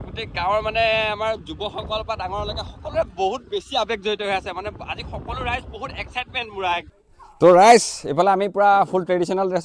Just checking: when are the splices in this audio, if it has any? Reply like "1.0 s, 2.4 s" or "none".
7.0 s